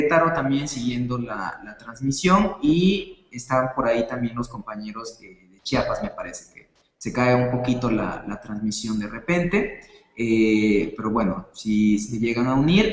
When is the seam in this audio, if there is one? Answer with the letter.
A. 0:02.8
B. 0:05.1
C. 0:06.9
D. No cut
A